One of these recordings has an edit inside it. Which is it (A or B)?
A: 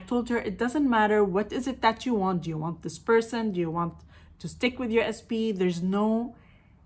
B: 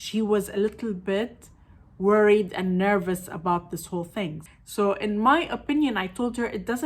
B